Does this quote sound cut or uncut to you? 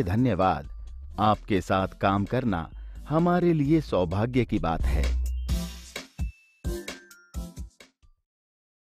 uncut